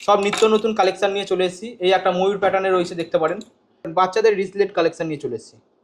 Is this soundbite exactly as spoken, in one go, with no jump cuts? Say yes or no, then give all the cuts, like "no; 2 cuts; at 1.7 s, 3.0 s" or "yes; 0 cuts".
no; 1 cut; at 3.9 s